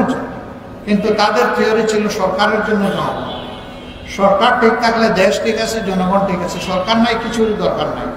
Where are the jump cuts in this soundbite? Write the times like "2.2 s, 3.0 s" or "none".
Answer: none